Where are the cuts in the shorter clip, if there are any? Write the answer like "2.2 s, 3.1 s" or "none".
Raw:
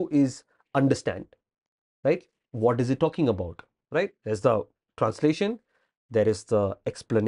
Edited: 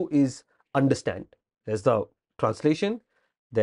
1.6 s

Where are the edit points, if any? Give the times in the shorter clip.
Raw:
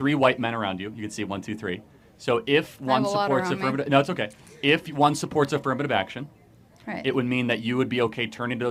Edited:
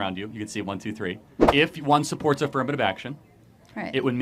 1.3 s

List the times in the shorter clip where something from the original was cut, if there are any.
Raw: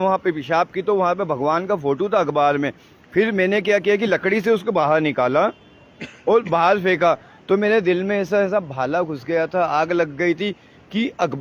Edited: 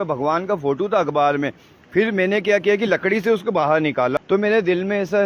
4.1 s

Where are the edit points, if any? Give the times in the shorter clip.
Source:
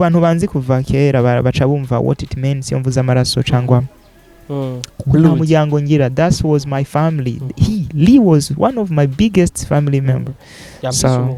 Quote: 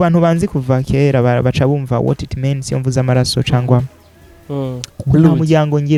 none

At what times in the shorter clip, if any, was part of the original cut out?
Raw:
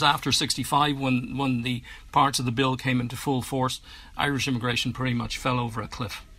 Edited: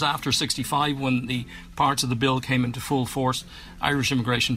1.3 s

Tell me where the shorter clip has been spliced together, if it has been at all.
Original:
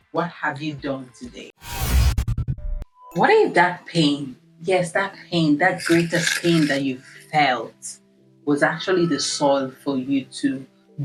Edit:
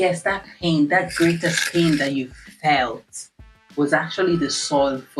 none

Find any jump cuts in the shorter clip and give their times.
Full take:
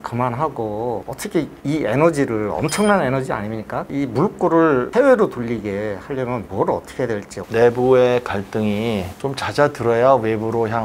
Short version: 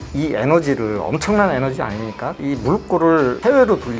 none

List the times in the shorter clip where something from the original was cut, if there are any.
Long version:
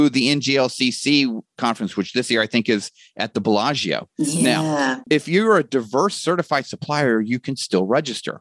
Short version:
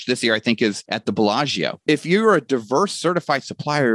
0.9 s, 1.8 s

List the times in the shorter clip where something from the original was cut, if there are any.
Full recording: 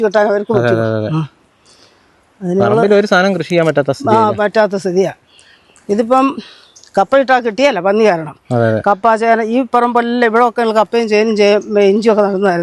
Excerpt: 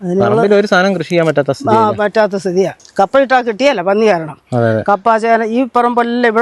2.8 s

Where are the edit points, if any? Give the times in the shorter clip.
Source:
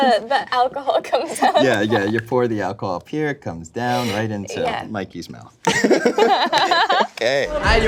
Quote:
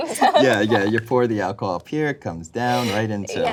none

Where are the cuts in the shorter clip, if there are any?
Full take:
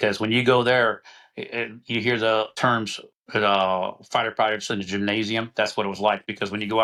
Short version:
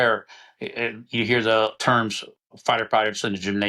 2.5 s

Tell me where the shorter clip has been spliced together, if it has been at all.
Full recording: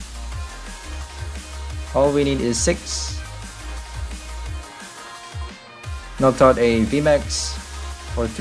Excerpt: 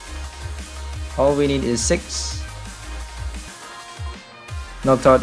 3.5 s

